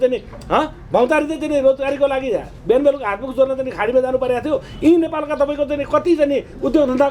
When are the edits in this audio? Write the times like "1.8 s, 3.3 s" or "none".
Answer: none